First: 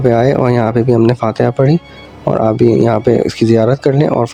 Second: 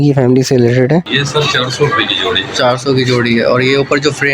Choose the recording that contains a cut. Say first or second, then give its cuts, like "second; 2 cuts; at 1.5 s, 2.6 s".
second; 1 cut; at 1.2 s